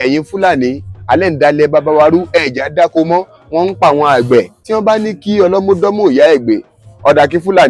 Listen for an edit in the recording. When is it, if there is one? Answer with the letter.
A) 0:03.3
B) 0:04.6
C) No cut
B